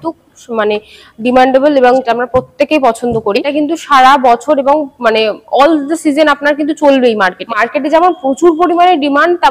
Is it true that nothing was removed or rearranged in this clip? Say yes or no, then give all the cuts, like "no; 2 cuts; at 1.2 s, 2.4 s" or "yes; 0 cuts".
no; 3 cuts; at 2.0 s, 3.4 s, 7.5 s